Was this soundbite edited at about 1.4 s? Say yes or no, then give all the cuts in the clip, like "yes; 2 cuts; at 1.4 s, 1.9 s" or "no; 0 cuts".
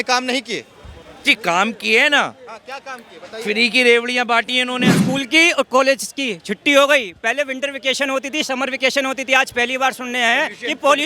no; 1 cut; at 4.9 s